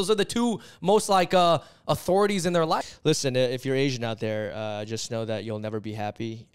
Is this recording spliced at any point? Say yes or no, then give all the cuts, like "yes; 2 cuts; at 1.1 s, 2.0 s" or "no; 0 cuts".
yes; 1 cut; at 2.9 s